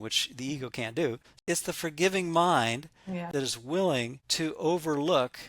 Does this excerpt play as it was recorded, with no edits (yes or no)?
no